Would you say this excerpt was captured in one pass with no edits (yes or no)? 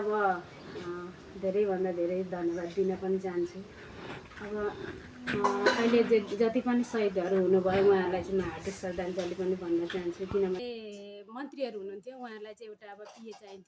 no